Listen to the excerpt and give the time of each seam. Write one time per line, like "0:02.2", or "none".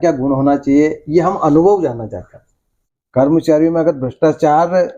0:02.8